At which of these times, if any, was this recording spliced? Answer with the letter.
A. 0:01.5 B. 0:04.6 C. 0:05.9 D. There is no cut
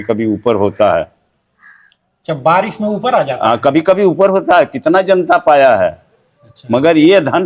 D